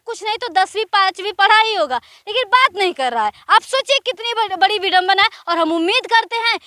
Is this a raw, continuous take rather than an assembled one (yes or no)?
yes